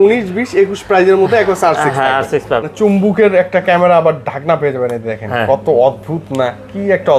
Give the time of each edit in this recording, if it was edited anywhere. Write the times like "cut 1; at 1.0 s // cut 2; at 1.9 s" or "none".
cut 1; at 2.6 s